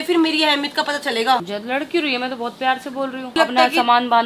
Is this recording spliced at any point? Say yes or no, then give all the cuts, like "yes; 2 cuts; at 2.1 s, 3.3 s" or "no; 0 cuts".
yes; 2 cuts; at 1.4 s, 3.3 s